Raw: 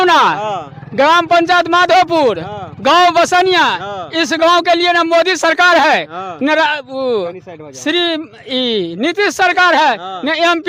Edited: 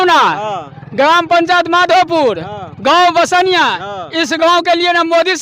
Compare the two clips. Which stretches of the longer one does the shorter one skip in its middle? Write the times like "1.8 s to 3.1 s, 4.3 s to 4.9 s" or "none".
none